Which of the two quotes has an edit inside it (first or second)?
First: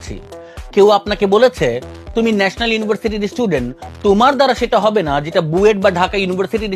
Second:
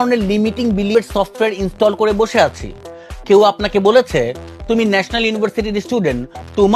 second